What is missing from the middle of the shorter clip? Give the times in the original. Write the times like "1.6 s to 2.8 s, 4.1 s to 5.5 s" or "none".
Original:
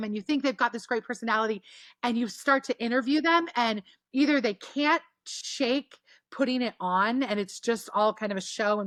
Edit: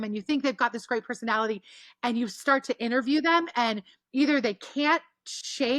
none